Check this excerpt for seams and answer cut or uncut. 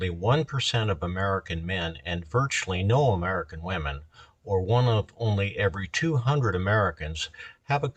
uncut